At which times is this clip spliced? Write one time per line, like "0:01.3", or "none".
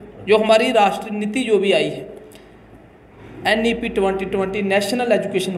none